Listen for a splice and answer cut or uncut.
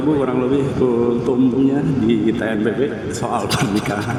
uncut